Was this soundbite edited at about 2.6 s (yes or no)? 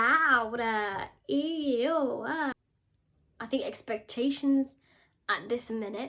yes